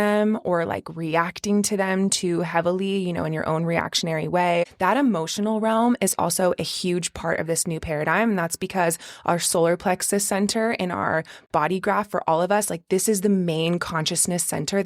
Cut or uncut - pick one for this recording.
cut